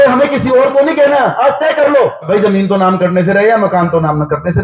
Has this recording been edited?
yes; 1 cut; at 2.3 s

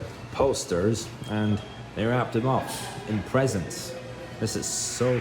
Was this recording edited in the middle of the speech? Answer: no; 0 cuts

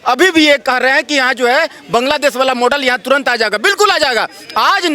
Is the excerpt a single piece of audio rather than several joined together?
yes; 0 cuts

